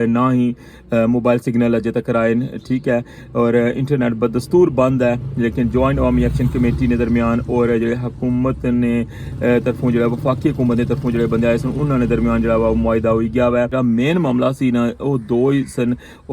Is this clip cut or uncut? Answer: cut